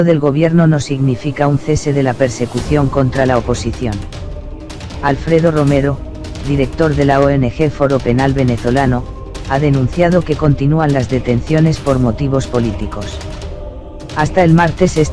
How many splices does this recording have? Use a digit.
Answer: 0